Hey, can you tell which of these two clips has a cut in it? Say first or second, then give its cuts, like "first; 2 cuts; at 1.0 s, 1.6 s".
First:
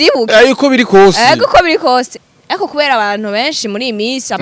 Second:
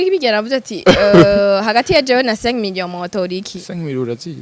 first; 1 cut; at 2.2 s